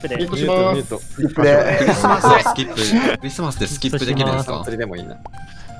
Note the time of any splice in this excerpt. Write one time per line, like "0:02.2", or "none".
0:03.2